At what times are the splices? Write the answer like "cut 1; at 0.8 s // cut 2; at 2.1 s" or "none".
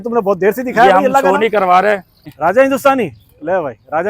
cut 1; at 2.3 s